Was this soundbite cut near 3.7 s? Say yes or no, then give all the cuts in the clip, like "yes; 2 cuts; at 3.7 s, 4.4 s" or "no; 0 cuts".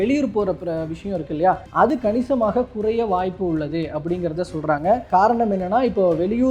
no; 2 cuts; at 1.7 s, 5.0 s